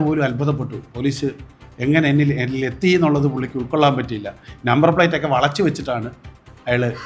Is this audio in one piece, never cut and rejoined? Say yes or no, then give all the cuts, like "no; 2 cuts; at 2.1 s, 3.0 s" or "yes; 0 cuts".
yes; 0 cuts